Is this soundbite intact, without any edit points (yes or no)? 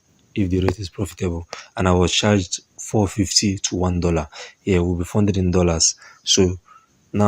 yes